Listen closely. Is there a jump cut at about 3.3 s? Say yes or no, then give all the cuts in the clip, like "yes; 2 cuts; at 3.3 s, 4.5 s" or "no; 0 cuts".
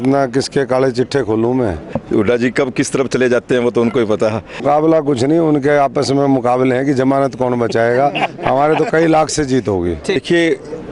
no; 2 cuts; at 1.9 s, 4.6 s